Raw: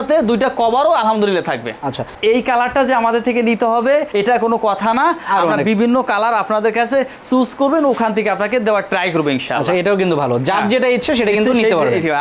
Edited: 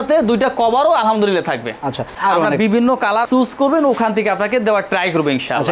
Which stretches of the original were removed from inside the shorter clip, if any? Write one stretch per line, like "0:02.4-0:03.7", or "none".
0:02.1-0:05.2
0:06.3-0:07.2